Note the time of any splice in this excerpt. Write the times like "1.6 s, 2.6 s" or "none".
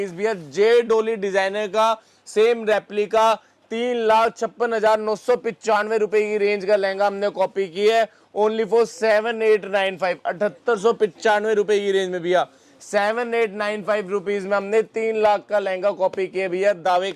none